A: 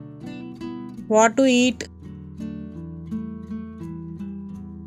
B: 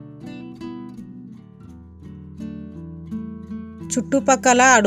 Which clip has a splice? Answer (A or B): A